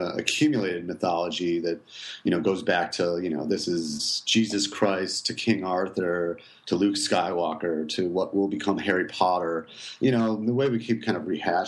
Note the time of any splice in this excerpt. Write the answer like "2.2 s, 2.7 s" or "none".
none